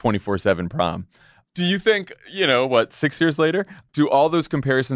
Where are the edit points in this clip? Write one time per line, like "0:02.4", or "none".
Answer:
0:01.5
0:03.8